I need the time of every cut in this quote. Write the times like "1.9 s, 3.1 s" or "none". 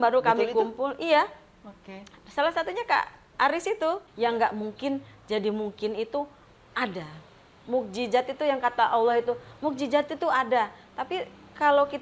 4.1 s